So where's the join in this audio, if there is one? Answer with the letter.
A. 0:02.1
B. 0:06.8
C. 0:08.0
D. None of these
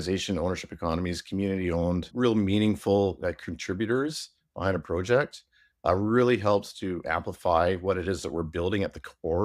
A